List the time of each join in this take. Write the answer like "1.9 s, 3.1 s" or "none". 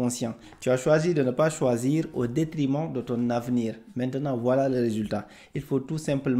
none